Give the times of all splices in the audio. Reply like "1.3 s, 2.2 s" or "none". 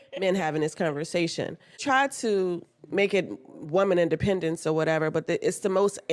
1.8 s